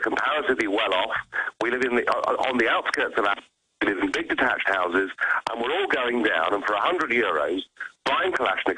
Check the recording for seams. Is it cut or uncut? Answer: uncut